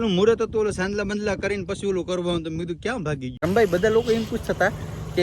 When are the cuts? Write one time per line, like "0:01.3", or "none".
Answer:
0:03.4